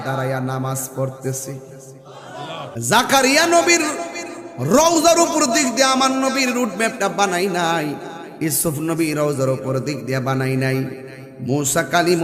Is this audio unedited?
no; 1 cut; at 2.7 s

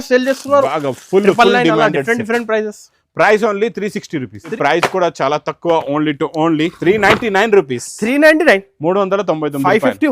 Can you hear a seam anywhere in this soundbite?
yes; 1 cut; at 4.5 s

